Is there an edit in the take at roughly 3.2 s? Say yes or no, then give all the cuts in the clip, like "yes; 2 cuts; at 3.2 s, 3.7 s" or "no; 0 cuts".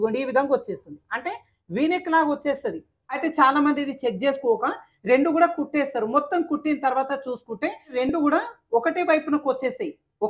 yes; 2 cuts; at 3.2 s, 7.9 s